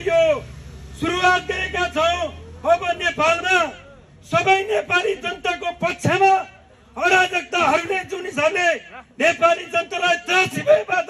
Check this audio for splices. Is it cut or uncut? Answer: uncut